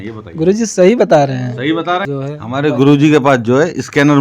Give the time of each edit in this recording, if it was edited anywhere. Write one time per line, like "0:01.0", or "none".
0:02.1